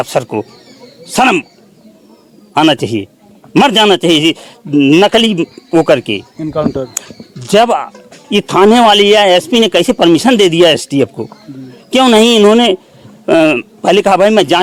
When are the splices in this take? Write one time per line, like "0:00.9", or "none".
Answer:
none